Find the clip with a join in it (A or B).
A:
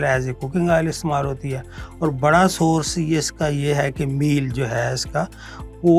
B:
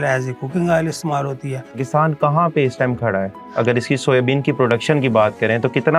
B